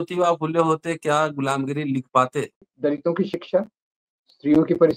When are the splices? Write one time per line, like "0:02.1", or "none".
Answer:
0:02.7